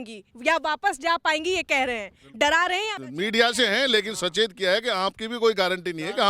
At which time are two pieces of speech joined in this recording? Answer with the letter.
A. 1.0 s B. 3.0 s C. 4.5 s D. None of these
B